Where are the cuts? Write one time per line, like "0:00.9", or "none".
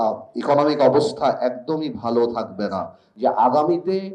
0:03.0